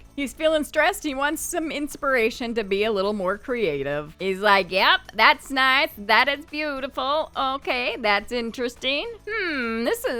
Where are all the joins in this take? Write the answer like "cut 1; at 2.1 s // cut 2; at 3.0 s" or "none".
none

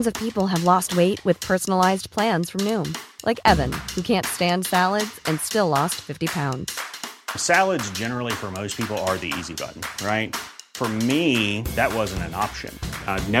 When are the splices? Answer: none

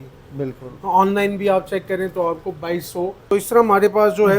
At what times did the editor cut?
cut 1; at 3.3 s

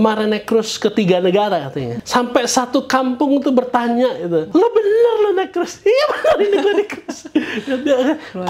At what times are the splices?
cut 1; at 1.9 s // cut 2; at 4.5 s

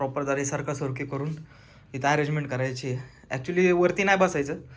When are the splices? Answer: none

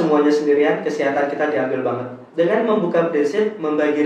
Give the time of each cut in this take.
cut 1; at 2.2 s

